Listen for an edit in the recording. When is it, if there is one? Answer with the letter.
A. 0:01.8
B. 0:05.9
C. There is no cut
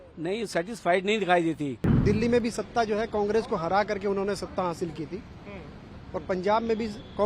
A